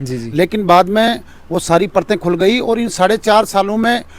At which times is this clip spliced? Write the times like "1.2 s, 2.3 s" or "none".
none